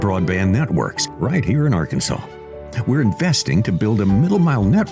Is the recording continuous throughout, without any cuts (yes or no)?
no